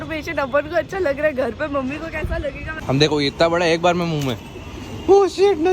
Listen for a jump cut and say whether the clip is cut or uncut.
cut